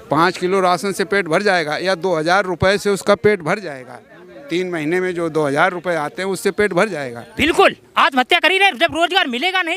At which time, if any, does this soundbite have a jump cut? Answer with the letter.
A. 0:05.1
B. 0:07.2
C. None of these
B